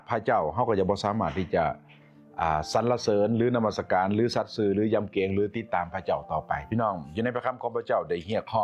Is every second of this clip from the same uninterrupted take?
yes; 0 cuts

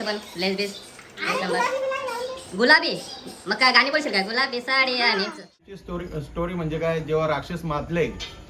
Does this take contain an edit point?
yes; 1 cut; at 5.7 s

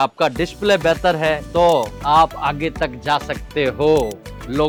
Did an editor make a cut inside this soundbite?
no; 0 cuts

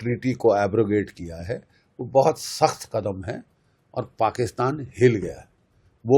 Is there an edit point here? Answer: no; 0 cuts

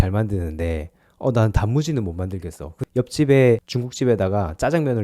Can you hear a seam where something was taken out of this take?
yes; 2 cuts; at 2.7 s, 3.8 s

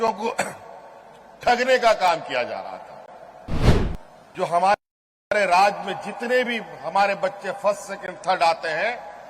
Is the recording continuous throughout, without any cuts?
no; 1 cut; at 3.7 s

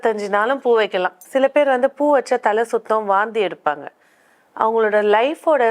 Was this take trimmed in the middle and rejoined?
yes; 1 cut; at 1.2 s

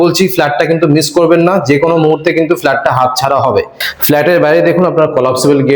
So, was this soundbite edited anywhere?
yes; 1 cut; at 3.7 s

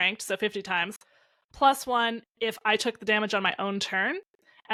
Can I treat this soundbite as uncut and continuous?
yes; 0 cuts

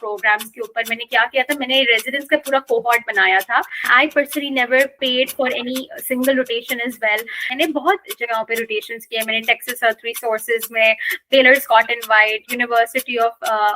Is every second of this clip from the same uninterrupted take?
no; 2 cuts; at 3.9 s, 7.5 s

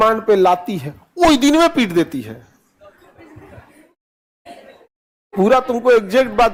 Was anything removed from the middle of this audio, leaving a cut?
no; 0 cuts

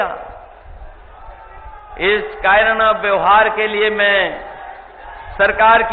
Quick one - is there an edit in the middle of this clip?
yes; 1 cut; at 1.9 s

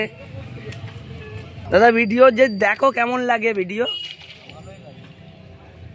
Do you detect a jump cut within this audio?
yes; 1 cut; at 1.5 s

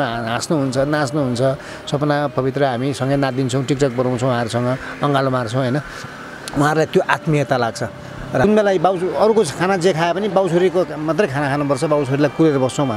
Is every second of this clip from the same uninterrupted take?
no; 1 cut; at 8.4 s

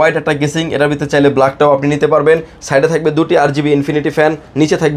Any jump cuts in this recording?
no; 0 cuts

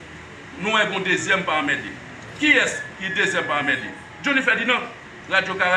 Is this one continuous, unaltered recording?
yes; 0 cuts

